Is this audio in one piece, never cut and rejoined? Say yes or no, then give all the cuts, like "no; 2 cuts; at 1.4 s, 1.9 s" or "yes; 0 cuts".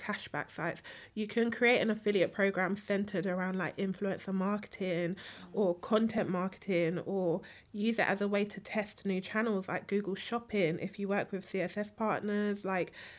yes; 0 cuts